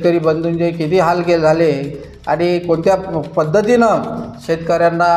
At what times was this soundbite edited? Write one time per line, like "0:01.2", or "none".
none